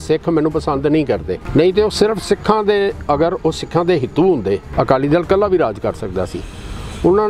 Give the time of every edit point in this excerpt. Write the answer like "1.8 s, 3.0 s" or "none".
1.4 s, 4.7 s